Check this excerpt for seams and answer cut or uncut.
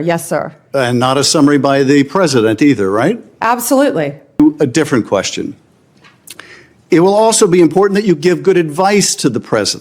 cut